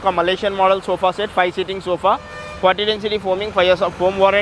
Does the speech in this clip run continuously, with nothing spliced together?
yes; 0 cuts

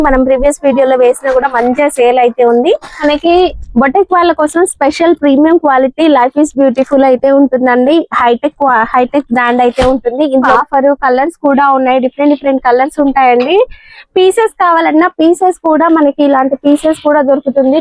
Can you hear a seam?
yes; 2 cuts; at 3.0 s, 10.5 s

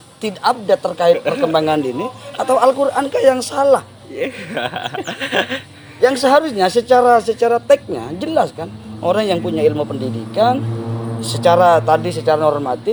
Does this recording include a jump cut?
no; 0 cuts

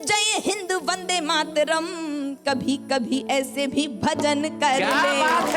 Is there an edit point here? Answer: no; 0 cuts

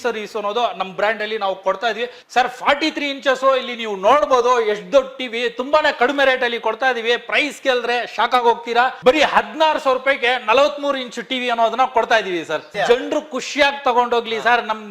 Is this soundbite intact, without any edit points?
no; 2 cuts; at 2.2 s, 12.7 s

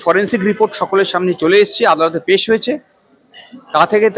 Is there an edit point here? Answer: no; 0 cuts

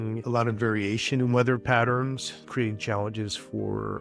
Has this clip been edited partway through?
yes; 1 cut; at 2.4 s

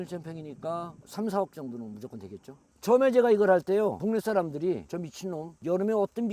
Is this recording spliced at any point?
no; 0 cuts

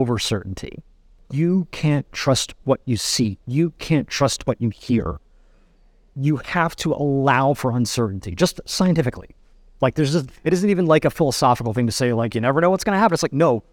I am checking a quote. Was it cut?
yes; 1 cut; at 1.2 s

